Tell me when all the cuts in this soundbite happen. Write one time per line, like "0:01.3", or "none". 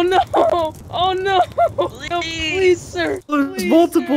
0:02.0
0:03.2